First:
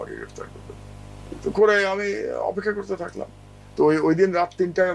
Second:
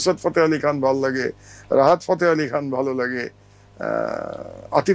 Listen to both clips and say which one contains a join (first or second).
first